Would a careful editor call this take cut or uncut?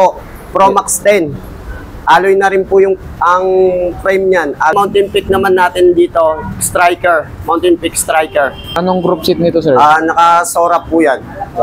cut